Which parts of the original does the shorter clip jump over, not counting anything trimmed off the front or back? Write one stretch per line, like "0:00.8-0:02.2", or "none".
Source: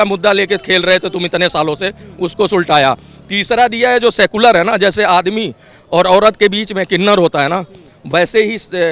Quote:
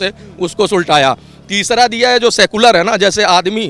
none